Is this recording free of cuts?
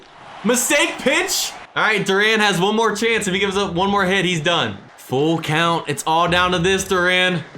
no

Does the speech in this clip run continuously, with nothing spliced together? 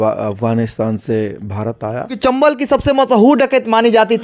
no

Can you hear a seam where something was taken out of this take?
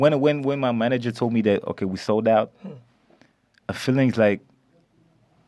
no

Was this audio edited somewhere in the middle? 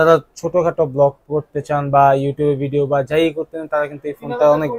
no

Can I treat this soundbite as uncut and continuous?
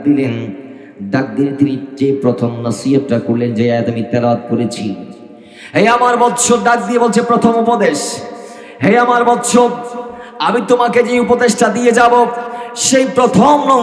yes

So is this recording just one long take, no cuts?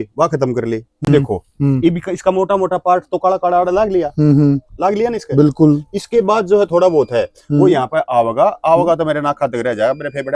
no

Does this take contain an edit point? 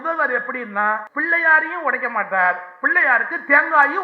yes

